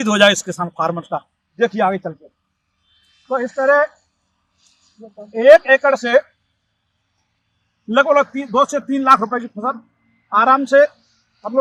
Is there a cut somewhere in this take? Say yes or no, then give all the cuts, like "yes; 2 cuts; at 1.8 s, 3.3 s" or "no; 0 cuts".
no; 0 cuts